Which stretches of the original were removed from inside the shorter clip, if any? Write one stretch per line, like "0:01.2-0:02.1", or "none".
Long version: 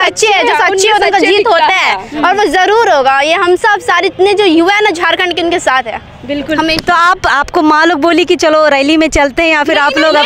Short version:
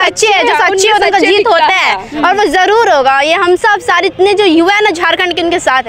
none